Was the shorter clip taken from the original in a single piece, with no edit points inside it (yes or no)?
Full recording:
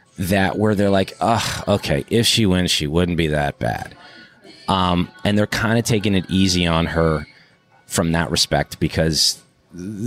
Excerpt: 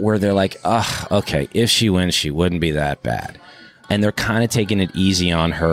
no